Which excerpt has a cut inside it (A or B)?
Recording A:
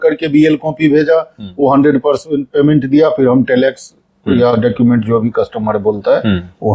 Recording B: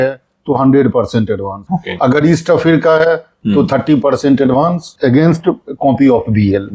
B